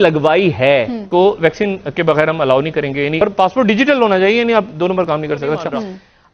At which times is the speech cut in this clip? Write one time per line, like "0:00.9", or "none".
0:01.0
0:03.2